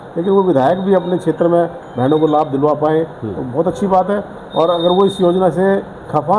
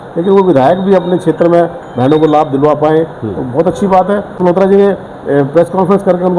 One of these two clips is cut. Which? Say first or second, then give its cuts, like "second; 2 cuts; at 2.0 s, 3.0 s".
second; 1 cut; at 4.3 s